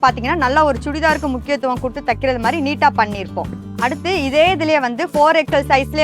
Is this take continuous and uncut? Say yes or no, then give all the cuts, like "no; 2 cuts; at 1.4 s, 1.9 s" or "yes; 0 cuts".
no; 1 cut; at 3.5 s